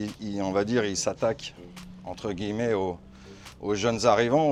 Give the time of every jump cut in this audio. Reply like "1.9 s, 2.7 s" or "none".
none